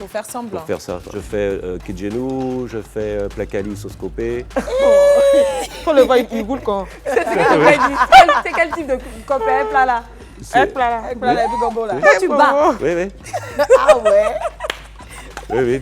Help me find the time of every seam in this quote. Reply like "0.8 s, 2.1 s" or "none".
1.1 s